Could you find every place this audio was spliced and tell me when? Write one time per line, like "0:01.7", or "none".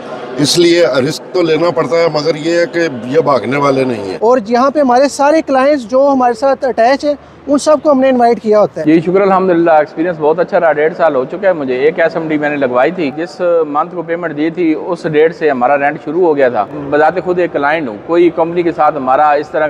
0:04.1
0:08.8
0:13.2
0:16.7